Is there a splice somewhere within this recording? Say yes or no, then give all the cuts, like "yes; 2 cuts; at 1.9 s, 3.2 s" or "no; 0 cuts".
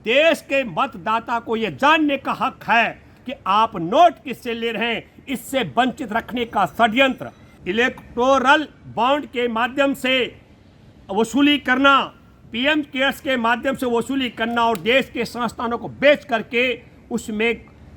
yes; 1 cut; at 7.5 s